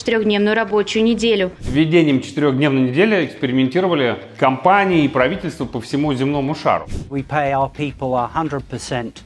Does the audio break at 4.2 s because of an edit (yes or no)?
yes